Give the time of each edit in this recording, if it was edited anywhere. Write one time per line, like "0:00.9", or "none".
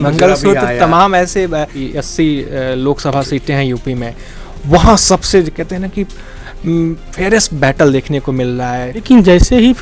0:01.8
0:09.0